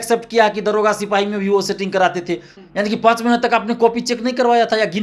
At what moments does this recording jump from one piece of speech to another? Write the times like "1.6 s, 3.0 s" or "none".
2.5 s